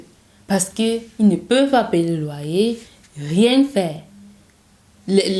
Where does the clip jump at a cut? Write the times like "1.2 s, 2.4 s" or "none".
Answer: none